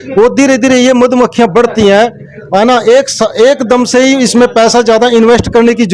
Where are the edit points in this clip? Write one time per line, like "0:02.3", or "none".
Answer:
none